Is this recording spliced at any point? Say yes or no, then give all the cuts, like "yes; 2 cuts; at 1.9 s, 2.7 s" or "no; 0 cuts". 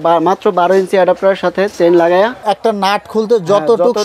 yes; 1 cut; at 2.4 s